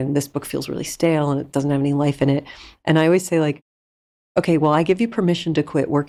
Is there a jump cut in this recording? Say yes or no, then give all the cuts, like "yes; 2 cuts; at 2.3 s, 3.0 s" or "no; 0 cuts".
no; 0 cuts